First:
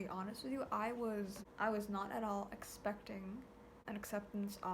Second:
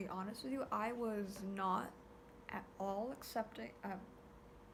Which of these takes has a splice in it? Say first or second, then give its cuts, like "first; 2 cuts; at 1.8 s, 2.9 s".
first; 2 cuts; at 1.4 s, 3.7 s